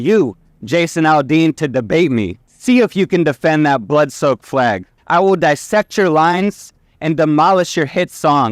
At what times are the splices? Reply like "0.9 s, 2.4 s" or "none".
2.4 s, 4.9 s